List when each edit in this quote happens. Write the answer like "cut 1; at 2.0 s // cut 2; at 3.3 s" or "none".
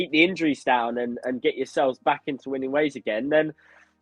none